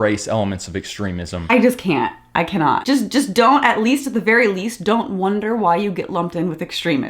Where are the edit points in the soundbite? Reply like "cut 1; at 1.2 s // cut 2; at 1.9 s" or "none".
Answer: cut 1; at 1.3 s // cut 2; at 2.8 s